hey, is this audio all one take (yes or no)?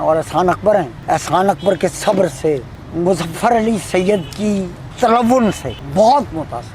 no